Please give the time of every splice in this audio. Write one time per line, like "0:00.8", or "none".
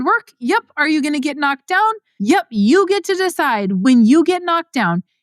0:02.1
0:03.8